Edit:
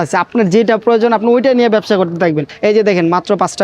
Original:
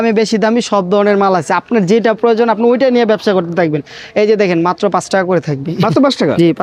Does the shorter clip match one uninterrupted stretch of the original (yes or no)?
no